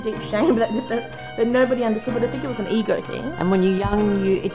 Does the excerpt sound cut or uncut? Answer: cut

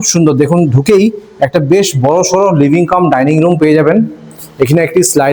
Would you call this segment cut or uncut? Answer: uncut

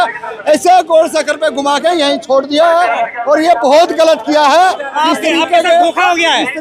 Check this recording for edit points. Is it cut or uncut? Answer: uncut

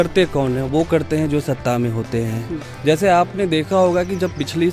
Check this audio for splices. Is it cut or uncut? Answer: uncut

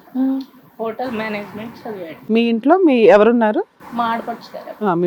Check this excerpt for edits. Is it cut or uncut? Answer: cut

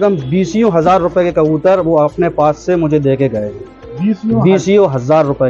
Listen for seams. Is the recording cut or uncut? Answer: uncut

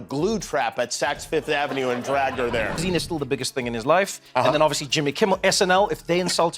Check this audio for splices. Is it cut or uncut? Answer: cut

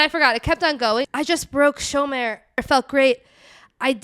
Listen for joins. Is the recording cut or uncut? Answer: cut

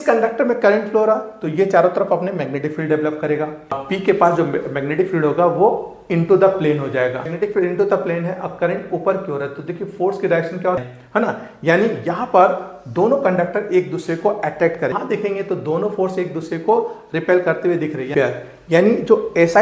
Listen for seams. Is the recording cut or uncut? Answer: cut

